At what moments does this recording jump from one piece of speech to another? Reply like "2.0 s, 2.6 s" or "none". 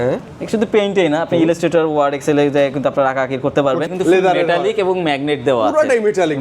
3.9 s